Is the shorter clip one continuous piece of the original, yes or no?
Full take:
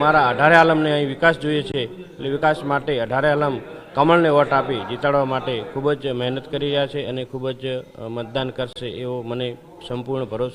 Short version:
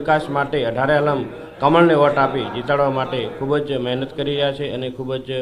yes